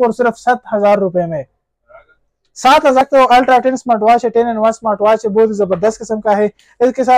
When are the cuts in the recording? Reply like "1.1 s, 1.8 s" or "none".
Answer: 3.0 s